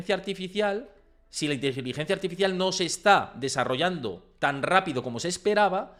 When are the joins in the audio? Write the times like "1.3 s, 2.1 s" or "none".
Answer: none